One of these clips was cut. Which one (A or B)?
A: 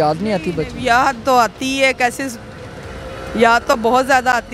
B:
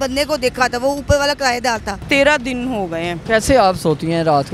B